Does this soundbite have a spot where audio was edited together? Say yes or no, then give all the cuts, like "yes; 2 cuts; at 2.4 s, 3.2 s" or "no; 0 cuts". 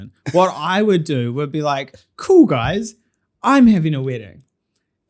no; 0 cuts